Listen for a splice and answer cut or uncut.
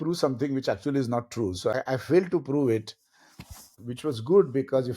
cut